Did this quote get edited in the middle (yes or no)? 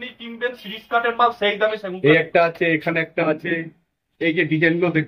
yes